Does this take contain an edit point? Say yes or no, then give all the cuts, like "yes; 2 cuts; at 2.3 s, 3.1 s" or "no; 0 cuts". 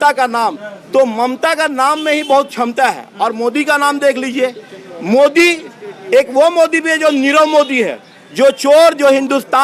no; 0 cuts